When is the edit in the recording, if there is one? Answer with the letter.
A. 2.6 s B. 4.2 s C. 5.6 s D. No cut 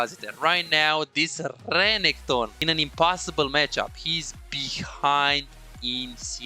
A